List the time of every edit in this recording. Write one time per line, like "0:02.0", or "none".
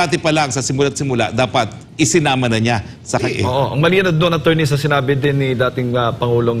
0:03.2